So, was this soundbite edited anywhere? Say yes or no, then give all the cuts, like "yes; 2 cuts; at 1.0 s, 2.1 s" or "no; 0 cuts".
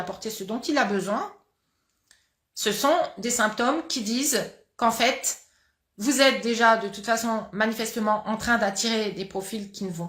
no; 0 cuts